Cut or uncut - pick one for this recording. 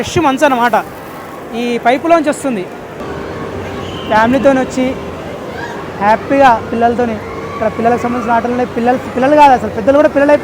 cut